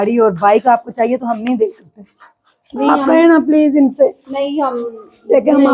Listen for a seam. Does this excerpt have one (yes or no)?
no